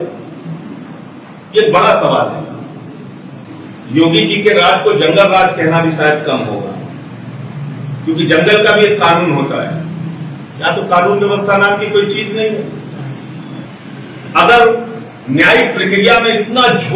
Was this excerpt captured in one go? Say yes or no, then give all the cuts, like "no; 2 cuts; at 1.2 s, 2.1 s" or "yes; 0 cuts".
no; 2 cuts; at 3.4 s, 13.7 s